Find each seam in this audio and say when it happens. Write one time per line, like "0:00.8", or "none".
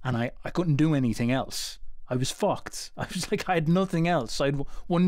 none